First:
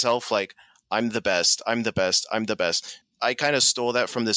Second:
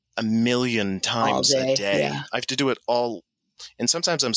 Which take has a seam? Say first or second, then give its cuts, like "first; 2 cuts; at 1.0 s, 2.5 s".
first; 1 cut; at 3.0 s